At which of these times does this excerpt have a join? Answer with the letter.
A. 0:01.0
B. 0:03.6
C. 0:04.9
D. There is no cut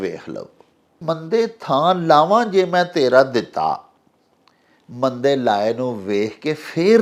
A